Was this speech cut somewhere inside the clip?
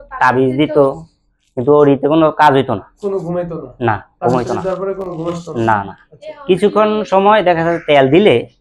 no; 0 cuts

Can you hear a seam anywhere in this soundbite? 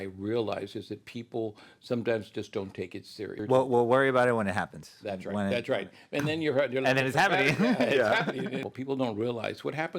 yes; 2 cuts; at 3.4 s, 8.6 s

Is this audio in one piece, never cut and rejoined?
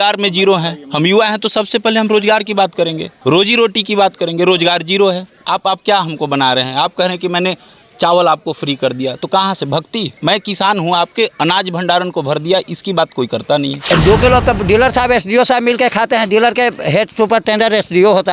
no; 4 cuts; at 3.1 s, 5.3 s, 10.1 s, 13.8 s

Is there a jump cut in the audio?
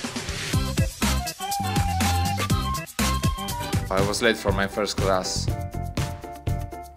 yes; 1 cut; at 3.8 s

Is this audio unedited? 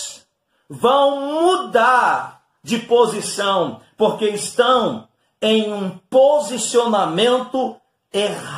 yes; 0 cuts

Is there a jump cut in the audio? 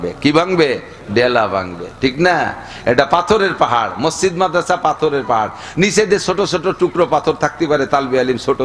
no; 0 cuts

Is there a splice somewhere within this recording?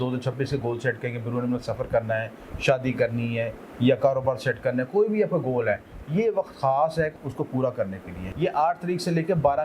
yes; 2 cuts; at 7.1 s, 8.2 s

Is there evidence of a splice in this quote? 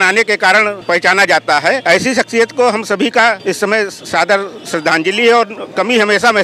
yes; 3 cuts; at 0.8 s, 1.8 s, 3.4 s

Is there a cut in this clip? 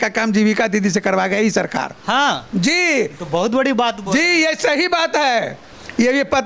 no; 0 cuts

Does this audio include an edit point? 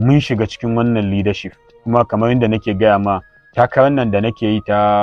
no; 0 cuts

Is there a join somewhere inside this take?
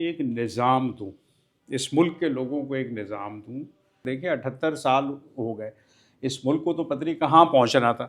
yes; 1 cut; at 4.0 s

